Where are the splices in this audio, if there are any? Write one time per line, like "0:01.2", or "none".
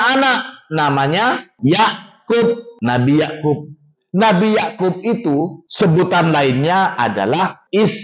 none